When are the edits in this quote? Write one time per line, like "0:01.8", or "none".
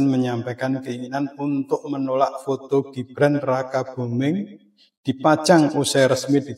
none